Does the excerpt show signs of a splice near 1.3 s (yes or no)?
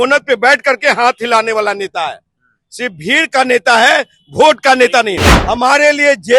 no